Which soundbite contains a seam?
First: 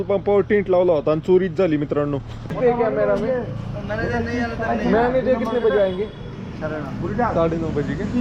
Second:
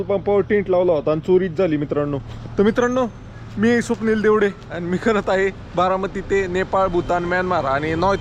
first; 1 cut; at 2.5 s

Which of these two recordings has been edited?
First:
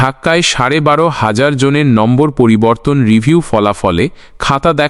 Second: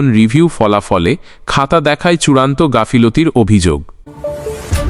second; 1 cut; at 3.9 s

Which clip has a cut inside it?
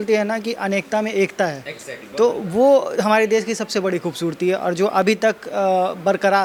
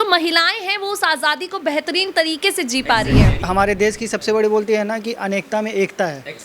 second; 1 cut; at 3.4 s

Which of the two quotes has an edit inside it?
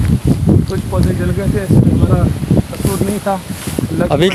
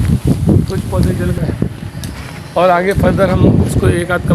second; 1 cut; at 1.4 s

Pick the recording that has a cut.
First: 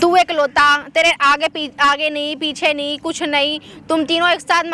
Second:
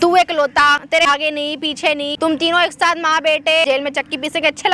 second; 3 cuts; at 0.8 s, 2.1 s, 3.6 s

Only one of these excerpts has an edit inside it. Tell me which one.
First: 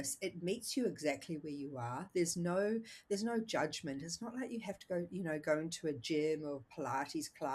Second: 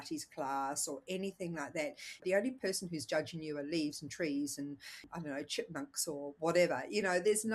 second; 2 cuts; at 2.2 s, 5.0 s

